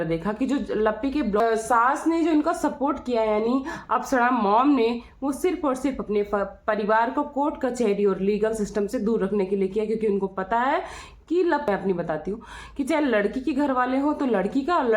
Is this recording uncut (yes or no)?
no